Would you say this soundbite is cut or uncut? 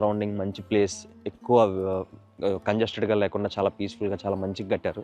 uncut